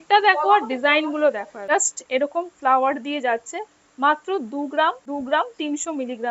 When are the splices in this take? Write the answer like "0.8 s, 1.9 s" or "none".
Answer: 1.5 s, 5.0 s